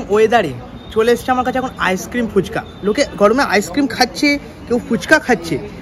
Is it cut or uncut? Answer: uncut